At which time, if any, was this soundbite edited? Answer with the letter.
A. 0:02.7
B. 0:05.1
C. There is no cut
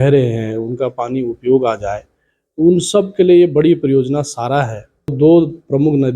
B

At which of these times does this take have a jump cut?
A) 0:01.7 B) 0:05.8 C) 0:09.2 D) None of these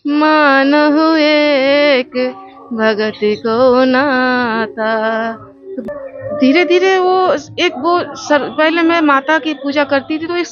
B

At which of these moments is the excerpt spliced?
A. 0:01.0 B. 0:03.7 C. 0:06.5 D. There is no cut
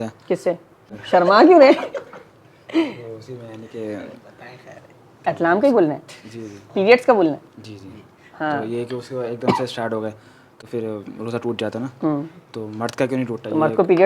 A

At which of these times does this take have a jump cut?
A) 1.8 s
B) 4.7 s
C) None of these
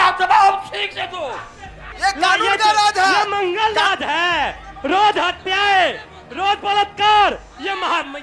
A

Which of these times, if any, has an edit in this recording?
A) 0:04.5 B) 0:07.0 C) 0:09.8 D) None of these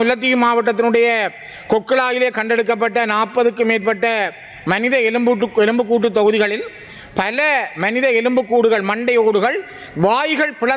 D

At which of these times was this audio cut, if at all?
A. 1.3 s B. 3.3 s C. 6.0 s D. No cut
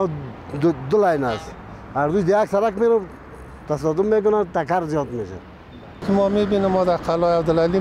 C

